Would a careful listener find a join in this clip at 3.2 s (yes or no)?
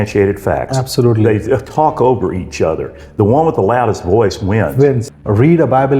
no